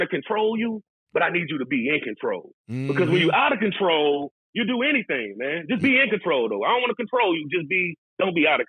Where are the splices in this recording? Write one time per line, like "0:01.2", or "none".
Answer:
none